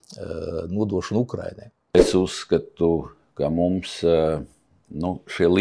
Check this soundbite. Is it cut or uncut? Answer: cut